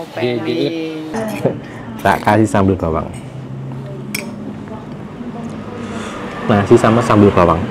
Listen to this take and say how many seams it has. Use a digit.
1